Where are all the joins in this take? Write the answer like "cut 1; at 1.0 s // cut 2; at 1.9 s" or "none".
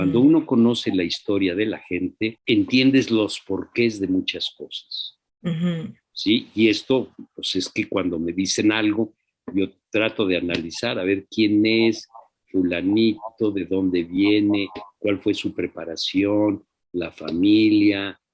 cut 1; at 2.4 s